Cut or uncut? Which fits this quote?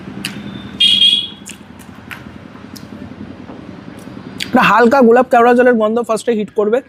uncut